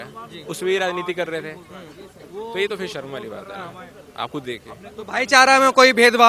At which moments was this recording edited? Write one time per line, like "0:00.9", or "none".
none